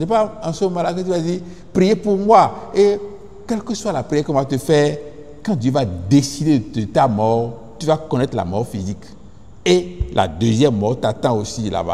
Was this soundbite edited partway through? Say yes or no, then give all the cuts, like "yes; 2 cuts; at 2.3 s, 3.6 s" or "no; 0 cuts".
no; 0 cuts